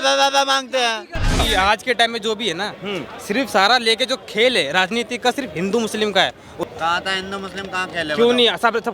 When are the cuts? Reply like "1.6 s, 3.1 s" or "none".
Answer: 1.4 s, 6.6 s